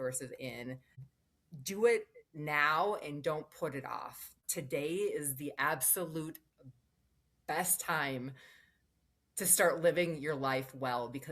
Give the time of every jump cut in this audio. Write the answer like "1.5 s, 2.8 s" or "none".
0.9 s, 4.4 s